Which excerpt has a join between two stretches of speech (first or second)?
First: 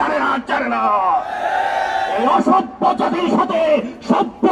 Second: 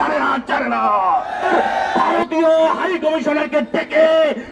second